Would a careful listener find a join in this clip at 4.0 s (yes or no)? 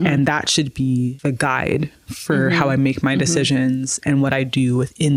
yes